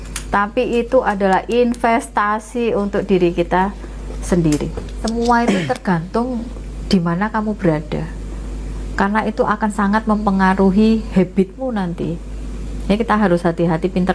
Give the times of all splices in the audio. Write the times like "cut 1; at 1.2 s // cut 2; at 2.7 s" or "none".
cut 1; at 5.0 s